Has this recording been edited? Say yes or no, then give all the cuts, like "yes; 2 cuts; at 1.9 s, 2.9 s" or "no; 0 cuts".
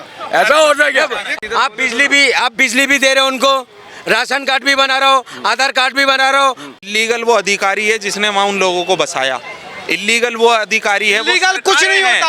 yes; 2 cuts; at 1.3 s, 6.7 s